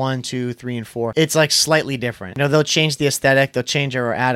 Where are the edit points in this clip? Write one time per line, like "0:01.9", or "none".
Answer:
0:01.1
0:02.3